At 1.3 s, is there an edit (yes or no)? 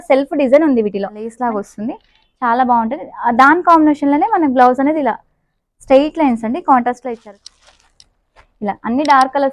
yes